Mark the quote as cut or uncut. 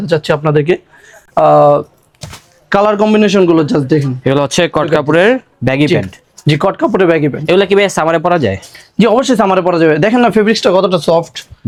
uncut